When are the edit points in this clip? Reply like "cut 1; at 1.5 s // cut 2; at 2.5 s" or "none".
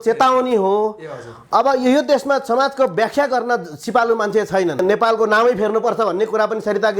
cut 1; at 4.8 s